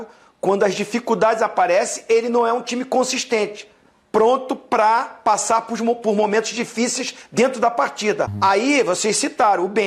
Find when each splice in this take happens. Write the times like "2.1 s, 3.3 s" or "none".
8.3 s